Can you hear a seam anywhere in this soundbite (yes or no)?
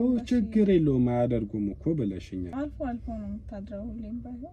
yes